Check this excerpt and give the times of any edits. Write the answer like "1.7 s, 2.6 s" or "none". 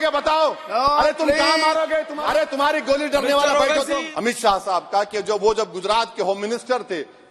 2.1 s, 4.1 s